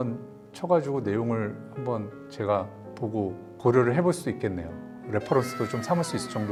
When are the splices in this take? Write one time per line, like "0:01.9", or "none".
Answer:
none